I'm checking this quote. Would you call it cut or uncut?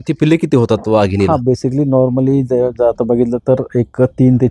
uncut